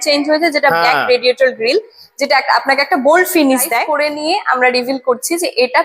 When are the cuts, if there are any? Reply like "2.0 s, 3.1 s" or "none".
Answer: 3.9 s